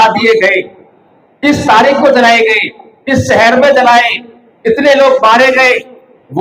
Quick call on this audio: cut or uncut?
uncut